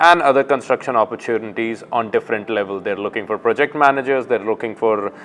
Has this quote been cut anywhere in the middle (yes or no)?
no